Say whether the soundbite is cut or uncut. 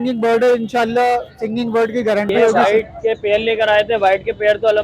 cut